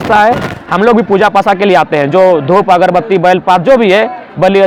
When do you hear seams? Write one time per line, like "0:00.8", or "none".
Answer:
none